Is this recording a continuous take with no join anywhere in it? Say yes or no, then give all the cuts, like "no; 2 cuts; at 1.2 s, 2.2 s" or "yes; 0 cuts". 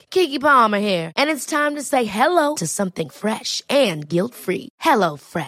yes; 0 cuts